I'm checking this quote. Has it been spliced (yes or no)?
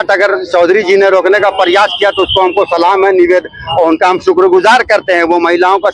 no